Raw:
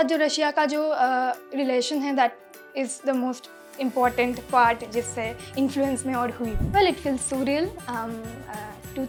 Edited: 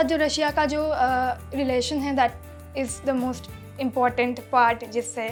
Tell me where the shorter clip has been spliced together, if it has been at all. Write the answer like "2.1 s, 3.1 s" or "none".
none